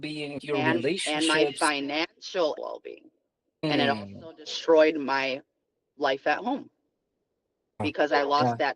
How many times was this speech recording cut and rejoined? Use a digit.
2